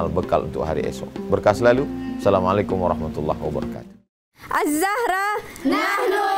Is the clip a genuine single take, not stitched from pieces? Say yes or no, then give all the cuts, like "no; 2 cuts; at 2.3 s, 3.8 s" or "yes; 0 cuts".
yes; 0 cuts